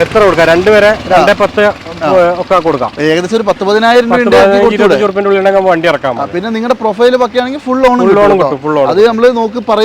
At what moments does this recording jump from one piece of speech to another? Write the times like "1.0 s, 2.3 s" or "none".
none